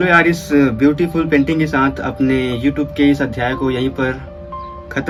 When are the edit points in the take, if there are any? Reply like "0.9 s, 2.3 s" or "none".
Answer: none